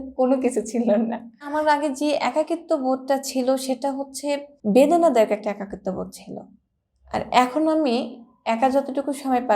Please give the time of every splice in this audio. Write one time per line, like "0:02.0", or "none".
0:01.5
0:04.5